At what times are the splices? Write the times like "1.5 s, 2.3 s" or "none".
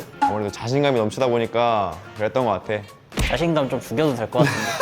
3.0 s

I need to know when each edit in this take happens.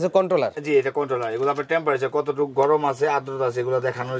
none

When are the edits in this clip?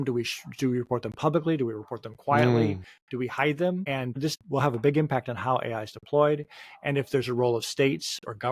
4.2 s

